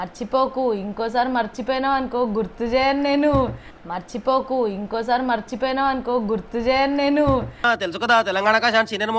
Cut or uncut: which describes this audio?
uncut